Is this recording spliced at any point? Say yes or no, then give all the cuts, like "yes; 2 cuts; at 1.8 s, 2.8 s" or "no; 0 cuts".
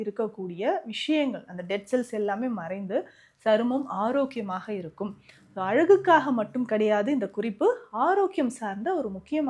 no; 0 cuts